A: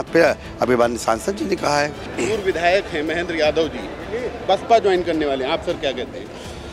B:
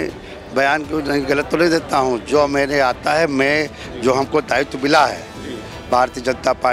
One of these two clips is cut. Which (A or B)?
A